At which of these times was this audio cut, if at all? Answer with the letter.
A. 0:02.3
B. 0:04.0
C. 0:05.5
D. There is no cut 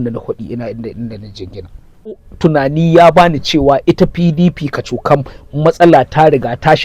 A